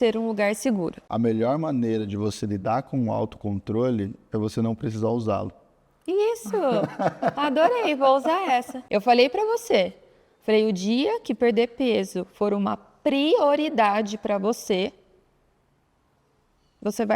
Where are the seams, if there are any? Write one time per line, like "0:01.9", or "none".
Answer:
0:01.0
0:08.8